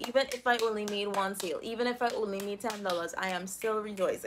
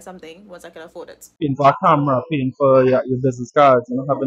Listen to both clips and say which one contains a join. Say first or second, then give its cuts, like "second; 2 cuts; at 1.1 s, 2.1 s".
second; 1 cut; at 1.2 s